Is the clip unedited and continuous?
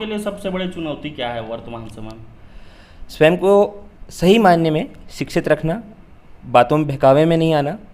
yes; 0 cuts

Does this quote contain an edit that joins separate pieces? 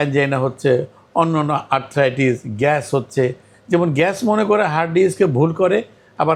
no; 0 cuts

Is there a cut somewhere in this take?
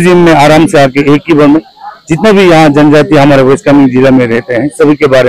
no; 0 cuts

